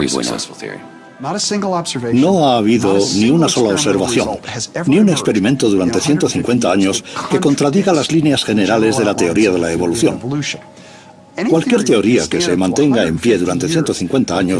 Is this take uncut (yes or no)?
no